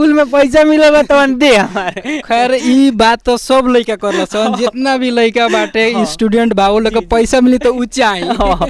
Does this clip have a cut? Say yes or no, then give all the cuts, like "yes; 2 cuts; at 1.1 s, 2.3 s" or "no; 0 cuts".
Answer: no; 0 cuts